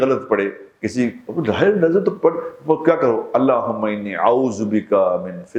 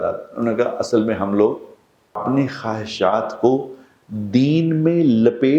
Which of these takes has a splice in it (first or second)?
second